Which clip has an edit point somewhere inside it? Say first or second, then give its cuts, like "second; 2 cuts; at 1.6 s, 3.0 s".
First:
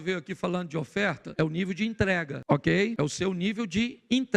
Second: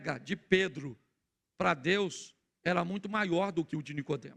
first; 3 cuts; at 1.2 s, 2.3 s, 2.9 s